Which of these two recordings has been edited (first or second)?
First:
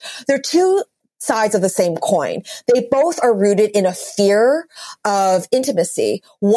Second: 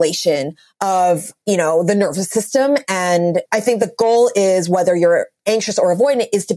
second